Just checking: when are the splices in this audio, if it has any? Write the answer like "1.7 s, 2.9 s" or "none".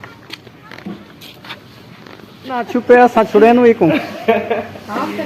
2.7 s